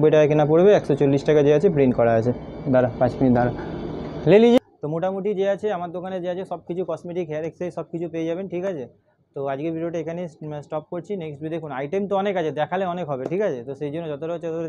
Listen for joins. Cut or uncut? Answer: uncut